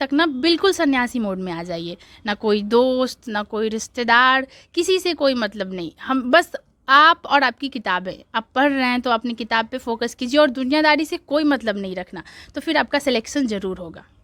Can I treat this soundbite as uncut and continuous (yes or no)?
yes